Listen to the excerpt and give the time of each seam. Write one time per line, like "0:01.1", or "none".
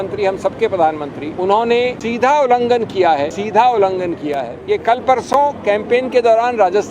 0:01.2
0:02.0
0:03.4
0:04.5